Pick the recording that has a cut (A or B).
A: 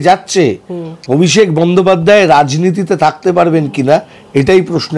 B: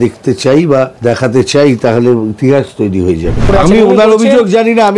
B